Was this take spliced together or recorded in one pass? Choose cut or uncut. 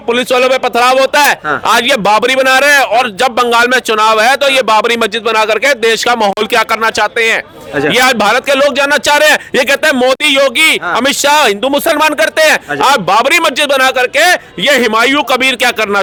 uncut